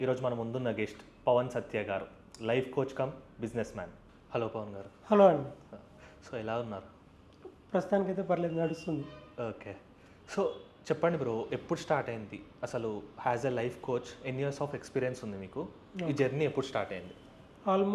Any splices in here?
no; 0 cuts

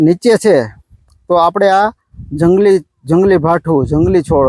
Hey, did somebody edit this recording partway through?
no; 0 cuts

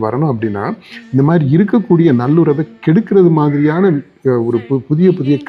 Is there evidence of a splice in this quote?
no; 0 cuts

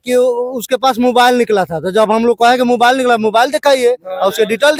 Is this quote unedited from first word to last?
yes; 0 cuts

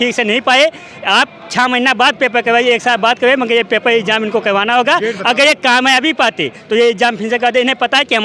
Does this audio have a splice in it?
no; 0 cuts

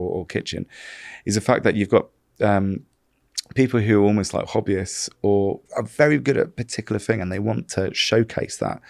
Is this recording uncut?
no; 1 cut; at 5.6 s

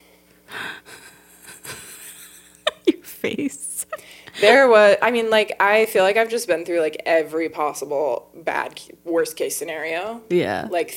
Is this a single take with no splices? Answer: yes; 0 cuts

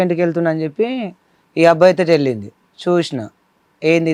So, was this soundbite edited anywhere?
no; 0 cuts

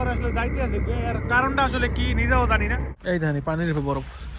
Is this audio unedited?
no; 1 cut; at 2.9 s

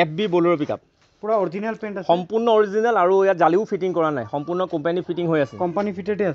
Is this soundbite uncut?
yes; 0 cuts

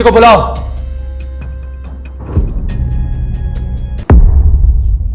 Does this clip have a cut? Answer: yes; 1 cut; at 4.0 s

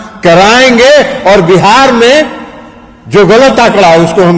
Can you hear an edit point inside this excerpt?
no; 0 cuts

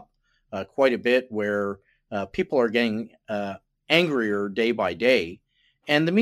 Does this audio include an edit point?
no; 0 cuts

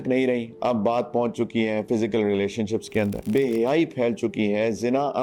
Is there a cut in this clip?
yes; 1 cut; at 3.2 s

